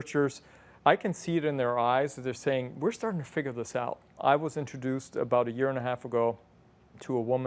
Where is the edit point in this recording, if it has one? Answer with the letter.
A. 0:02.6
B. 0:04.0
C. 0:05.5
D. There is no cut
B